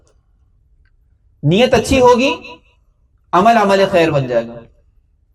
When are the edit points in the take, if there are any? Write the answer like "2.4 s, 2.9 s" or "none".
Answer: none